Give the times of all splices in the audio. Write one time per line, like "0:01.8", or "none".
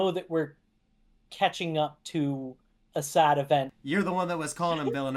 0:03.7